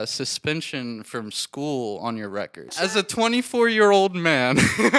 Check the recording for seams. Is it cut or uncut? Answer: cut